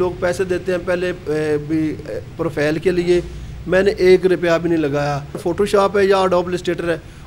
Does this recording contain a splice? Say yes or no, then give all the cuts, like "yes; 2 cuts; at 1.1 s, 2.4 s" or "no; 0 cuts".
yes; 1 cut; at 5.4 s